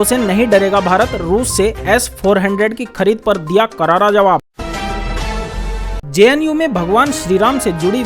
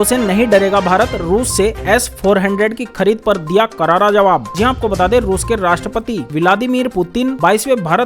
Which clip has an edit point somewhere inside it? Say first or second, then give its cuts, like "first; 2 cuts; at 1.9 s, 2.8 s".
first; 2 cuts; at 4.5 s, 5.7 s